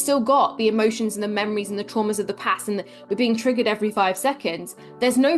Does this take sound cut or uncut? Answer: uncut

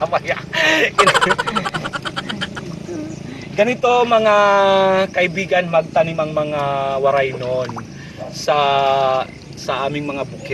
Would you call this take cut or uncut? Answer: uncut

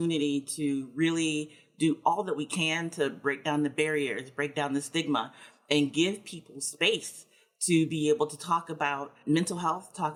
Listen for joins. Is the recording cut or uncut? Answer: uncut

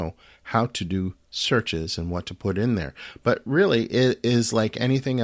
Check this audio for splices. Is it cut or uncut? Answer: uncut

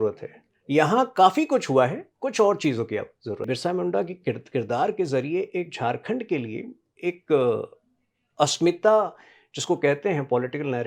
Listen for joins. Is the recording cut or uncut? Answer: cut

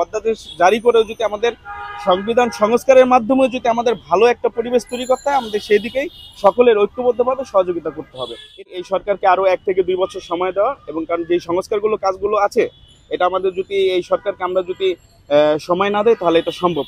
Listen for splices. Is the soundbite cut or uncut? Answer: cut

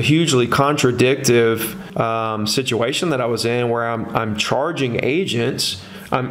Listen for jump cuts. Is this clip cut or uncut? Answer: cut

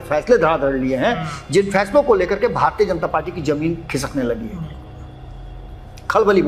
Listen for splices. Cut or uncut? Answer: uncut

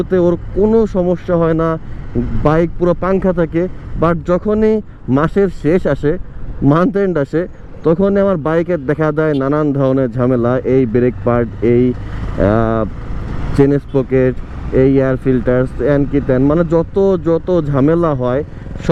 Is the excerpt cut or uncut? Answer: uncut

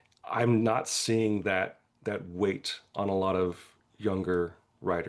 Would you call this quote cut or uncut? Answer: uncut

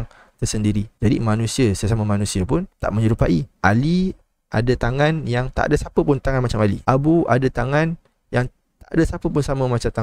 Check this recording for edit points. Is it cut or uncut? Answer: uncut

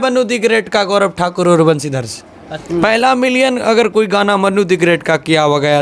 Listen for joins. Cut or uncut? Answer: cut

